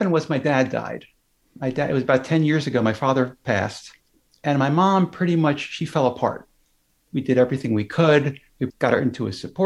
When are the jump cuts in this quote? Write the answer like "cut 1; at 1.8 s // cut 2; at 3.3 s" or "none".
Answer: cut 1; at 7.0 s // cut 2; at 8.6 s